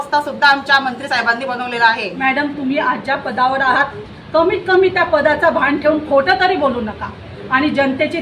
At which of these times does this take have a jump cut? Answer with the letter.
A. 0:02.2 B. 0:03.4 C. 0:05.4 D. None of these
A